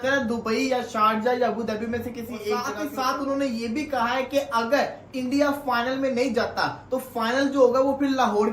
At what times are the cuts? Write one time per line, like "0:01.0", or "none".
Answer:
0:02.8

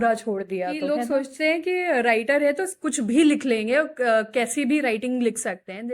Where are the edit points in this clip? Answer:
0:00.9

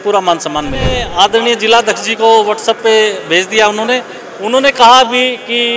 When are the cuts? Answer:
0:01.0

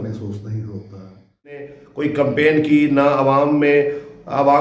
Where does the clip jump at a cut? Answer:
0:01.8

